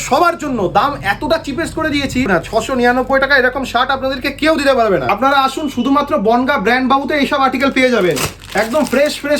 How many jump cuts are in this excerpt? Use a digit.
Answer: 3